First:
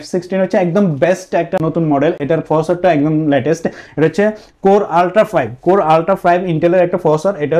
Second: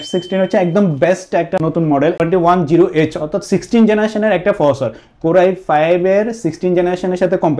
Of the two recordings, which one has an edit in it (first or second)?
second